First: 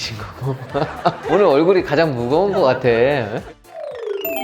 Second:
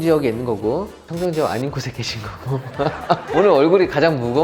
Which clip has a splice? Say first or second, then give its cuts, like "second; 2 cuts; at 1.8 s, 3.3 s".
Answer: first; 1 cut; at 3.4 s